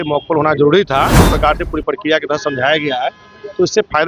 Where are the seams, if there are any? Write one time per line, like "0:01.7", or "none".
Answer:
0:01.2

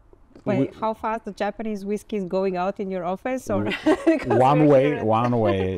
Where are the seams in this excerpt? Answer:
none

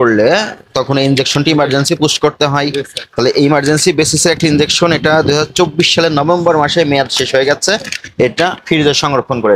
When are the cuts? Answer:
none

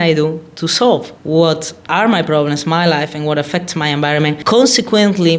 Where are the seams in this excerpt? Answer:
0:04.4

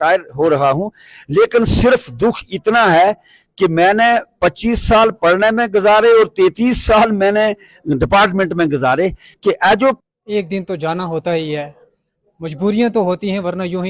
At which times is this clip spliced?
0:10.0

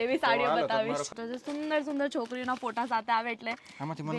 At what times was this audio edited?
0:01.1

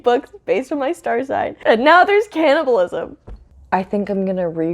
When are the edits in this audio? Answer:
0:01.5
0:03.5

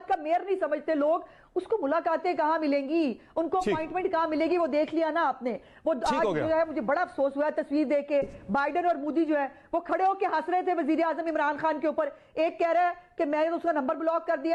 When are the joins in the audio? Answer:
none

